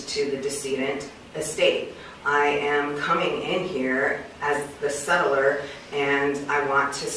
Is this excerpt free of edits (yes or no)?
yes